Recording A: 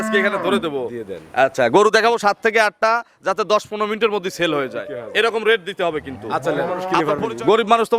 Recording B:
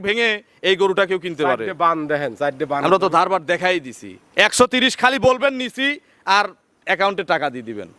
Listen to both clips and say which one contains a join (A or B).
A